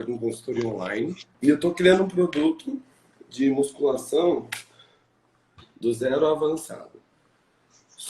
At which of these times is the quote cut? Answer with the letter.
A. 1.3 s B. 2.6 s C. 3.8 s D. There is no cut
A